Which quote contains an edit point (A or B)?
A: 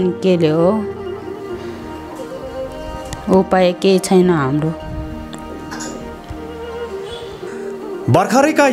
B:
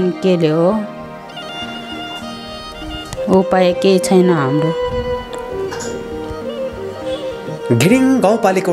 B